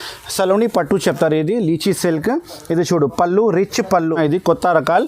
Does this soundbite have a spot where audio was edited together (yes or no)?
yes